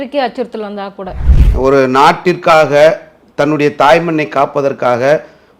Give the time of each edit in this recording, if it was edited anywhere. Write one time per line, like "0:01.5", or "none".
0:01.2